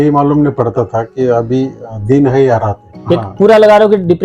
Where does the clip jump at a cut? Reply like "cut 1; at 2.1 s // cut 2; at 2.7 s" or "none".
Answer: cut 1; at 2.9 s

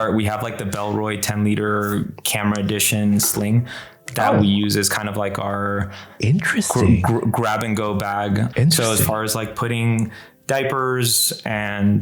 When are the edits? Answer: cut 1; at 8.5 s

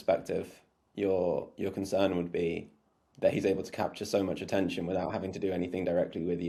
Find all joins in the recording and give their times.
none

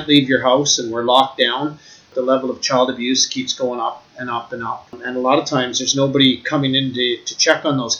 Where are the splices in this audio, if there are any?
cut 1; at 2.1 s // cut 2; at 5.0 s

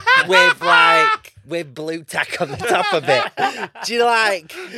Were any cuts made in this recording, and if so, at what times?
none

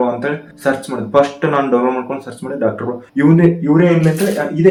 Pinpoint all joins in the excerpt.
none

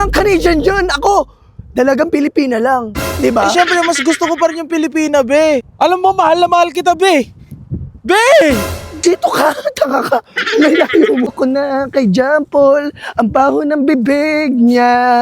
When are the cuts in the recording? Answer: cut 1; at 5.7 s // cut 2; at 11.3 s

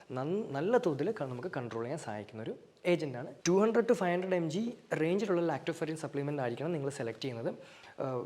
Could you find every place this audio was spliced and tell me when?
cut 1; at 3.3 s

